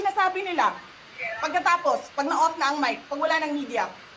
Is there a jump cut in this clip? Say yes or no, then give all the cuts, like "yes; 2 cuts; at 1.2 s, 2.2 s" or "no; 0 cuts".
no; 0 cuts